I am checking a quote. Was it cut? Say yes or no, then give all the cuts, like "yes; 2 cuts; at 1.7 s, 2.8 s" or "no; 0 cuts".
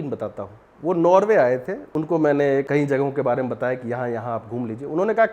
yes; 2 cuts; at 1.8 s, 2.7 s